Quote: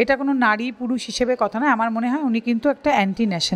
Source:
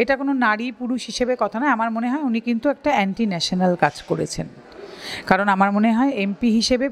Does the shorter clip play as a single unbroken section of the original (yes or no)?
yes